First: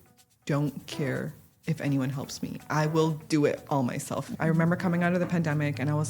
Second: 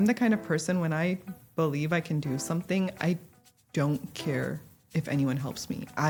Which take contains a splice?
first; 1 cut; at 4.3 s

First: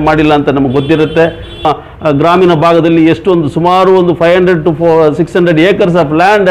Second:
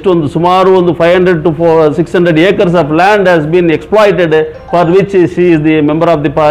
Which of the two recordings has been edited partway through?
first; 1 cut; at 1.6 s

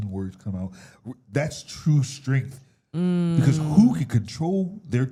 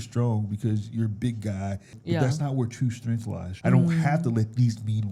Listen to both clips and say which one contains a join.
second; 2 cuts; at 2.0 s, 3.5 s

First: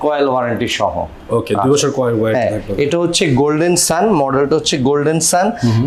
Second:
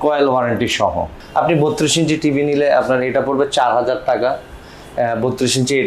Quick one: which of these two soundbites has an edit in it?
second; 1 cut; at 1.2 s

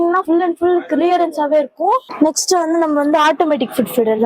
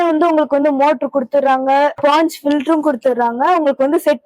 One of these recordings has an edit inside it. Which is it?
first; 1 cut; at 2.1 s

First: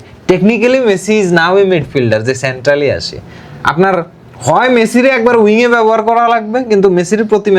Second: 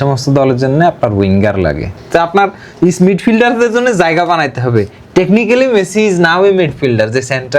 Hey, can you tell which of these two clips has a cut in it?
second; 1 cut; at 1.9 s

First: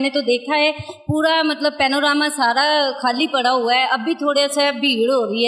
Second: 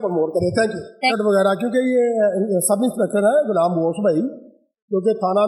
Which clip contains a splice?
second; 1 cut; at 1.1 s

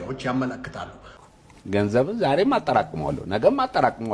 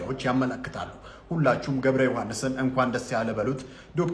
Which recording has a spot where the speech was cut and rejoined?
first; 1 cut; at 1.2 s

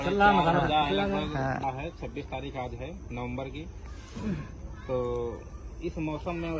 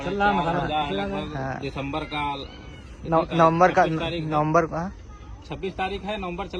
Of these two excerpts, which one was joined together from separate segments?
first; 1 cut; at 1.6 s

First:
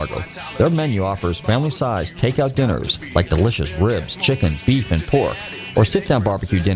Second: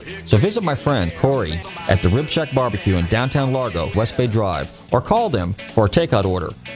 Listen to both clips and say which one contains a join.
second; 2 cuts; at 1.3 s, 3.9 s

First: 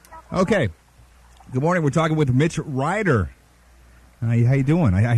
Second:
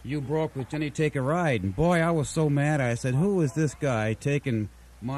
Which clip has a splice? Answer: second; 1 cut; at 0.9 s

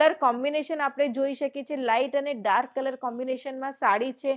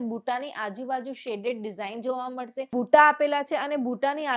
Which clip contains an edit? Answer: second; 1 cut; at 2.7 s

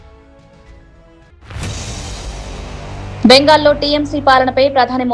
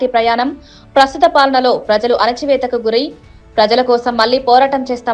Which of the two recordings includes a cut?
first; 2 cuts; at 1.3 s, 3.2 s

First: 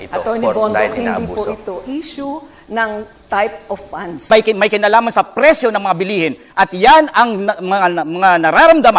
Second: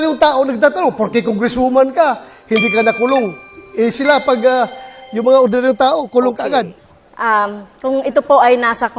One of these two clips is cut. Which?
first; 1 cut; at 4.3 s

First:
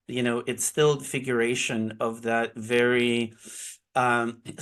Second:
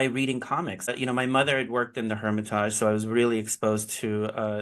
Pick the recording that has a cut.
second; 1 cut; at 0.9 s

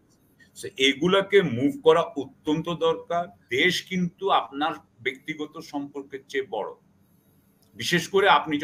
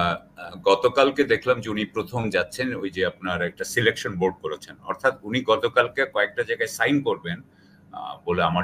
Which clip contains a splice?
first; 1 cut; at 3.4 s

